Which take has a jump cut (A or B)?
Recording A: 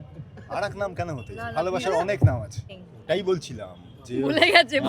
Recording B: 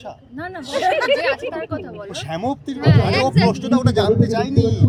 A